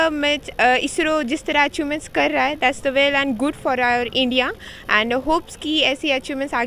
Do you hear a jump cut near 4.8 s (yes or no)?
no